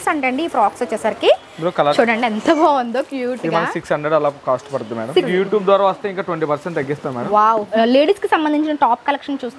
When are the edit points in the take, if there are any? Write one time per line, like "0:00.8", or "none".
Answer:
0:01.9
0:05.3
0:07.7